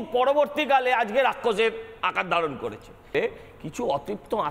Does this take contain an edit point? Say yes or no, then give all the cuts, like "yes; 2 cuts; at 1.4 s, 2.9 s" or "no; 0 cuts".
yes; 1 cut; at 3.1 s